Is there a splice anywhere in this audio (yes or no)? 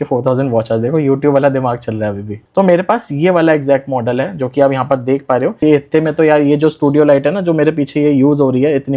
yes